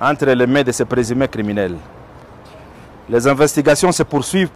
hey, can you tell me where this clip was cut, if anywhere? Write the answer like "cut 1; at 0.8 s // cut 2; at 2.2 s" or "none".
none